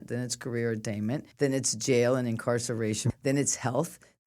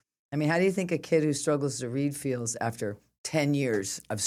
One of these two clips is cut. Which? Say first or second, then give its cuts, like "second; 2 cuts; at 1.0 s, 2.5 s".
first; 2 cuts; at 1.3 s, 3.0 s